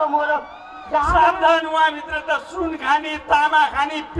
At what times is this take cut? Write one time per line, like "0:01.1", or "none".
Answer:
0:01.1